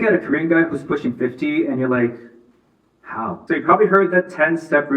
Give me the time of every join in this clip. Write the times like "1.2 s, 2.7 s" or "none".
3.4 s